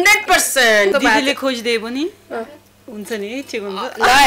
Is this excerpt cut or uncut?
cut